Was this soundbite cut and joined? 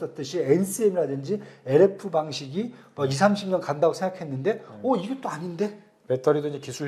no; 0 cuts

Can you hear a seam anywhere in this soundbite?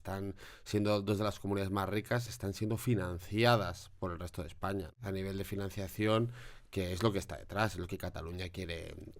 yes; 1 cut; at 5.0 s

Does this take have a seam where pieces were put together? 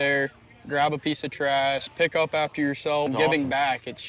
yes; 2 cuts; at 1.9 s, 3.1 s

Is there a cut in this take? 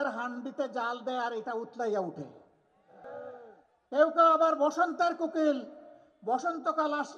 yes; 1 cut; at 3.0 s

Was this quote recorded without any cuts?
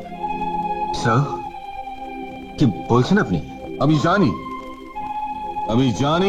yes; 0 cuts

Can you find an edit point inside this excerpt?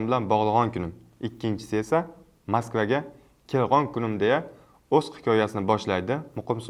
no; 0 cuts

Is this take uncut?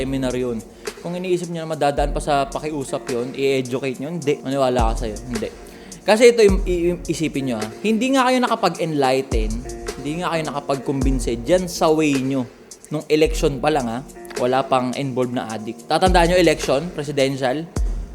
no; 3 cuts; at 4.4 s, 7.7 s, 15.7 s

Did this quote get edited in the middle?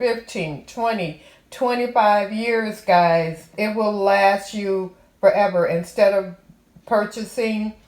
yes; 1 cut; at 3.5 s

